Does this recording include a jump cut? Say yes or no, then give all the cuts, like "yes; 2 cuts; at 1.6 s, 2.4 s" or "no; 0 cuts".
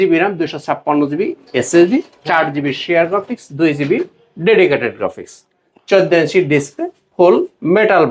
no; 0 cuts